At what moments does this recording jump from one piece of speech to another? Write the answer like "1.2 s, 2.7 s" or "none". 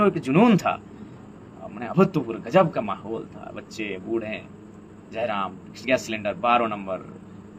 none